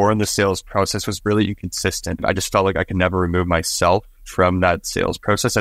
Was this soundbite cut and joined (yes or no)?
yes